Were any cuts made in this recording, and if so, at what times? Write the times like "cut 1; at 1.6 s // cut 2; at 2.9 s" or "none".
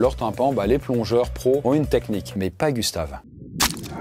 none